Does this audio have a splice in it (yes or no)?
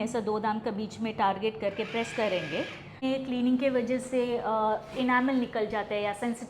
yes